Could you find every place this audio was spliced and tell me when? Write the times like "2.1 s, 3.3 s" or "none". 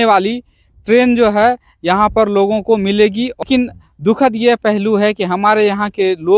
3.4 s